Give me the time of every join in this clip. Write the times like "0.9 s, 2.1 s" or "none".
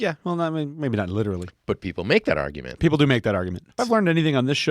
1.5 s, 3.6 s